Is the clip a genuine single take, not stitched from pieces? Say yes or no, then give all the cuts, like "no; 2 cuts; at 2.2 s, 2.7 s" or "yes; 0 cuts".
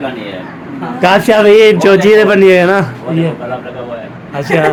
yes; 0 cuts